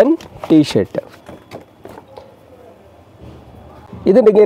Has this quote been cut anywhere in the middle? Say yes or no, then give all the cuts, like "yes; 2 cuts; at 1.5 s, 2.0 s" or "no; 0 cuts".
no; 0 cuts